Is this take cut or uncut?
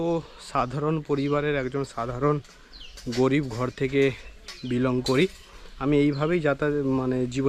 uncut